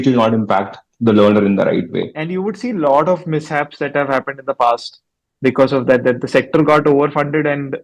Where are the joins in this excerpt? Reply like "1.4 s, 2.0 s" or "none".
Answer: 2.2 s